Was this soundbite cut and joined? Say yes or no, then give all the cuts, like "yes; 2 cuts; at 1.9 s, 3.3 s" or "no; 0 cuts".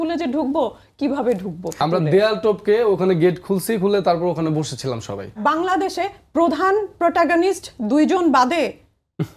yes; 2 cuts; at 1.8 s, 5.4 s